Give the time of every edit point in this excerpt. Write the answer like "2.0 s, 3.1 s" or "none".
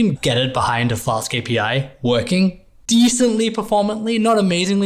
none